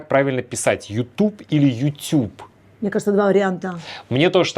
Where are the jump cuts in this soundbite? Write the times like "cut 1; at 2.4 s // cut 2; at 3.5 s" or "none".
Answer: none

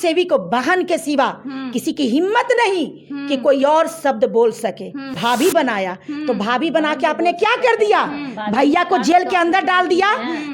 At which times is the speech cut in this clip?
cut 1; at 5.2 s

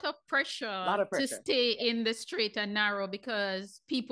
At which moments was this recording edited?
none

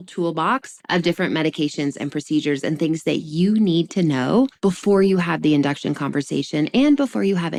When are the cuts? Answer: none

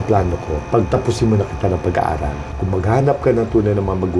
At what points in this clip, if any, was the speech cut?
cut 1; at 2.4 s

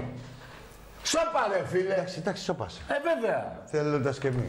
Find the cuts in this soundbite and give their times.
cut 1; at 2.1 s

